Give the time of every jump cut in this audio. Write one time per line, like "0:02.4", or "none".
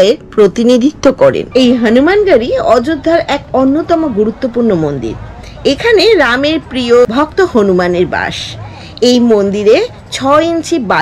0:01.4
0:07.1